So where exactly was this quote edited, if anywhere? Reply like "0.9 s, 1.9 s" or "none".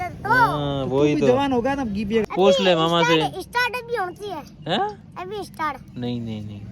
2.3 s